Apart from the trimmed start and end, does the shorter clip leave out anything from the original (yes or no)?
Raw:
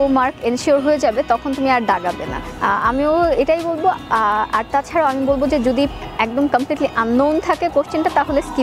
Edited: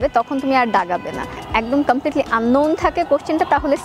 yes